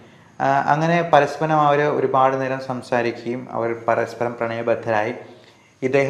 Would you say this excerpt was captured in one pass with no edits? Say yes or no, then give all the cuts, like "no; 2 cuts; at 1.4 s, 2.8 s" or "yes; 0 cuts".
yes; 0 cuts